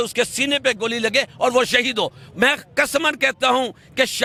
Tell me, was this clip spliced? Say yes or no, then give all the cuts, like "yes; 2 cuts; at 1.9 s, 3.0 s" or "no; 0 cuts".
no; 0 cuts